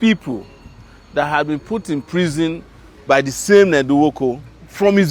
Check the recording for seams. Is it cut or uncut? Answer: uncut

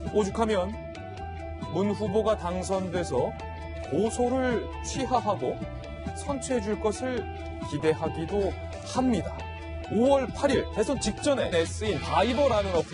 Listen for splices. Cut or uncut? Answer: uncut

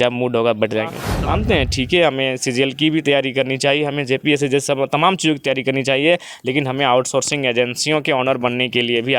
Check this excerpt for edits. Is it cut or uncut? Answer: cut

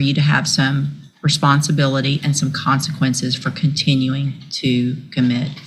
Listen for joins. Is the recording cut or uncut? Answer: uncut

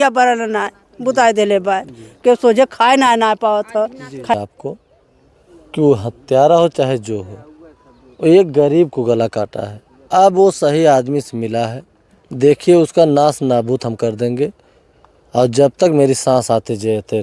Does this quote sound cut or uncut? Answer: cut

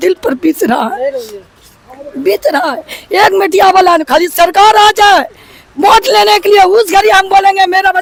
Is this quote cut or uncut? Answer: uncut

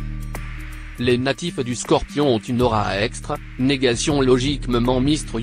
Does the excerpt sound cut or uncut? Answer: cut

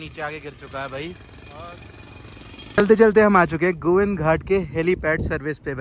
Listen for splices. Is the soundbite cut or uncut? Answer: uncut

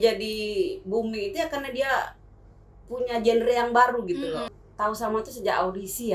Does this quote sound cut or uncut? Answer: cut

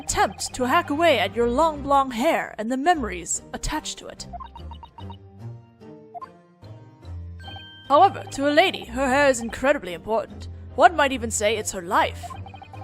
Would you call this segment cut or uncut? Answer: cut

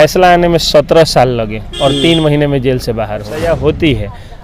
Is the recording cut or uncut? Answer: cut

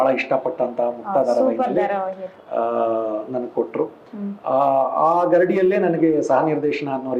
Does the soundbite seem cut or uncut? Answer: uncut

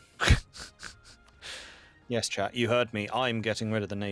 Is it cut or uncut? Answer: cut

